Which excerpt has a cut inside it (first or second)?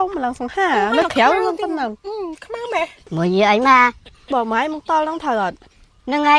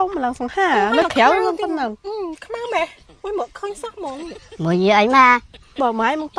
first